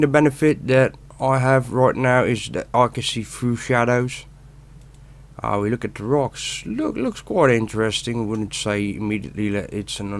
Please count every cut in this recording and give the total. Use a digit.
1